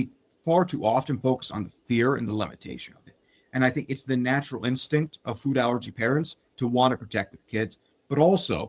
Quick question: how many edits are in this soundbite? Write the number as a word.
zero